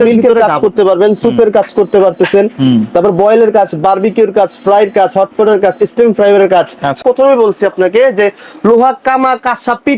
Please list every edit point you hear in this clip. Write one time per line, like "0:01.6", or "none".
0:07.0